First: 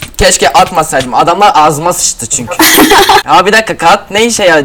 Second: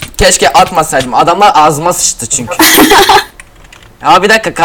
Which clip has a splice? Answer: first; 1 cut; at 3.2 s

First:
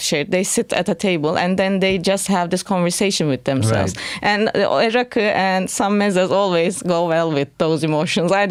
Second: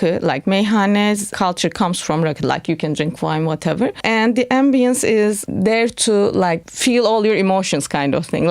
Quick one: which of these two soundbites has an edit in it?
second; 4 cuts; at 1.3 s, 4.0 s, 5.4 s, 6.7 s

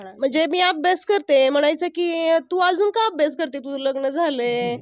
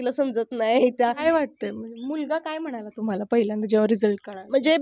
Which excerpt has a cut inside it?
second; 1 cut; at 1.2 s

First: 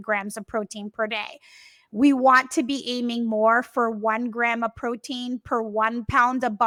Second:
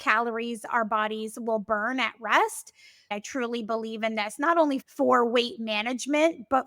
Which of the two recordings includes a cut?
second; 2 cuts; at 3.1 s, 4.8 s

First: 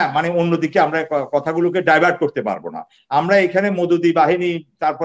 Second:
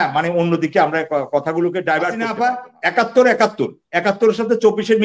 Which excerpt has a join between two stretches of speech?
second; 1 cut; at 2.2 s

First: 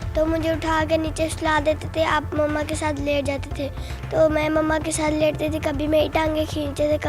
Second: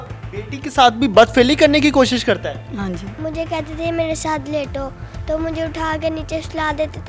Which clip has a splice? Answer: second; 1 cut; at 3.1 s

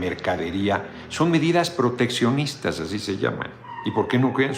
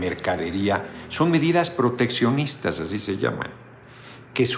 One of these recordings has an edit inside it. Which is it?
first; 1 cut; at 3.6 s

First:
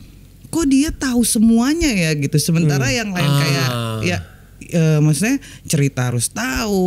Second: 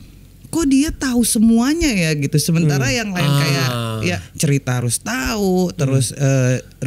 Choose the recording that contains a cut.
second; 1 cut; at 4.3 s

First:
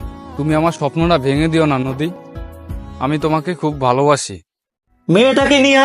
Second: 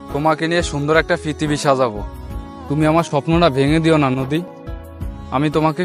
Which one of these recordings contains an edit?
first; 1 cut; at 4.7 s

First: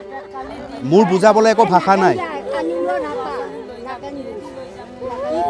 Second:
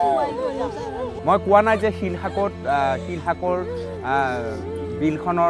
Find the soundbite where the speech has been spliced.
second; 1 cut; at 1.1 s

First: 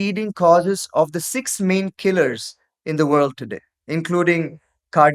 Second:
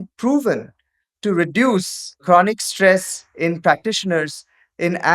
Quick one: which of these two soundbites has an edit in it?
second; 1 cut; at 2.2 s

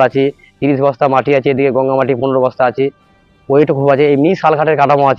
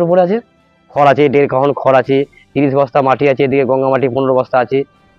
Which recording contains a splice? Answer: second; 1 cut; at 0.9 s

